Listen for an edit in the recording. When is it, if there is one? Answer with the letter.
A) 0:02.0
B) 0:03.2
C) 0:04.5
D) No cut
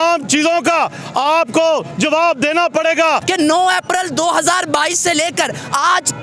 B